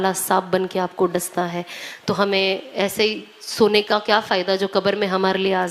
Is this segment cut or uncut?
uncut